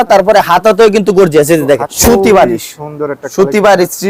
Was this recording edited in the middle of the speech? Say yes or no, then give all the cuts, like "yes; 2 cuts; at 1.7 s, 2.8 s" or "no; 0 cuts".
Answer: yes; 1 cut; at 1.9 s